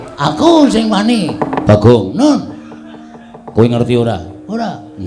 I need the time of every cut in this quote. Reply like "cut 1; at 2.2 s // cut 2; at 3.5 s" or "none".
cut 1; at 1.5 s